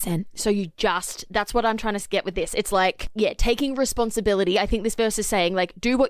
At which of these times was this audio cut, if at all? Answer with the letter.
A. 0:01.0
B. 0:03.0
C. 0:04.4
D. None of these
B